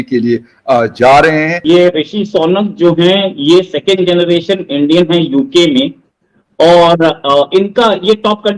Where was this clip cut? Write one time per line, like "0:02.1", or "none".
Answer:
none